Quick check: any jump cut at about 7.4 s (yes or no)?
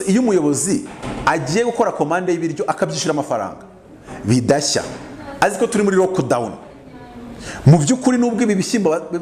no